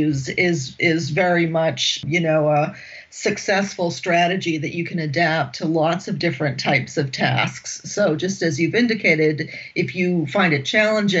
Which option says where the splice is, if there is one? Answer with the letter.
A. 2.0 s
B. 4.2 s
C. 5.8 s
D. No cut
A